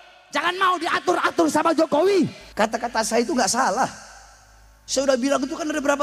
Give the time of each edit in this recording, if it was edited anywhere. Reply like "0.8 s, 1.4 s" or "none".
2.4 s